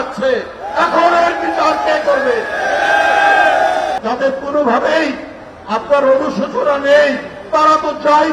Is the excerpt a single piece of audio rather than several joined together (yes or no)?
no